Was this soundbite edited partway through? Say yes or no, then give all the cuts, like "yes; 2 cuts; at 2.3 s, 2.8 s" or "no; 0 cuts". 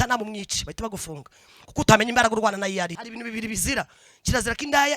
yes; 1 cut; at 3.0 s